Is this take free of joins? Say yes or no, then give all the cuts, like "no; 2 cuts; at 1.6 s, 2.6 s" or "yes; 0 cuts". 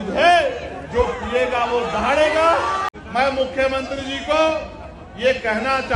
no; 1 cut; at 2.9 s